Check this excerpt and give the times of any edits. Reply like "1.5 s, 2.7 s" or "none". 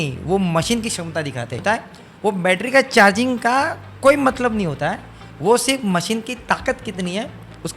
1.6 s